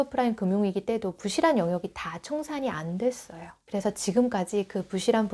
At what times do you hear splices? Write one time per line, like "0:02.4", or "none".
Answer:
none